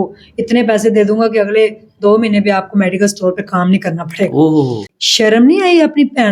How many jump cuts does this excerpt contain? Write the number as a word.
one